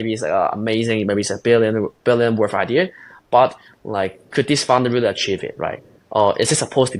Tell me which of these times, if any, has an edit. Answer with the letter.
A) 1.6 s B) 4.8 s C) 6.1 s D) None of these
D